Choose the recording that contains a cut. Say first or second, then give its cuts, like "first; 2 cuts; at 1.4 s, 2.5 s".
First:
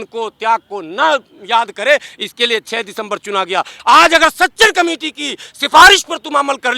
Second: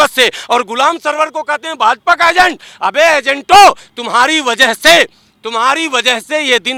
first; 1 cut; at 3.7 s